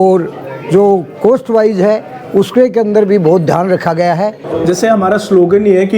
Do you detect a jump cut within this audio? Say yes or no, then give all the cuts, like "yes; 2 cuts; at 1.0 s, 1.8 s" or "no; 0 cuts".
yes; 1 cut; at 4.4 s